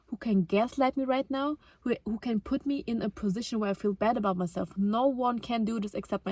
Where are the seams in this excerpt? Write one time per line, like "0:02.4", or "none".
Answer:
none